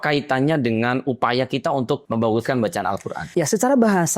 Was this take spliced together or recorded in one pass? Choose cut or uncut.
cut